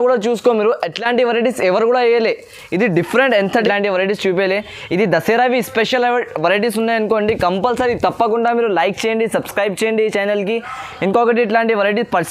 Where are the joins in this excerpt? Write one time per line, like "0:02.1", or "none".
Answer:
0:03.6